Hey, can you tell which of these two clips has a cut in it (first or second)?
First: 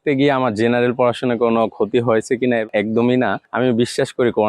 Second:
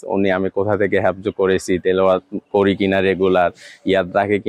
first